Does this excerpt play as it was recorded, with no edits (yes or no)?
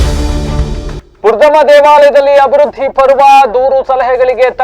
no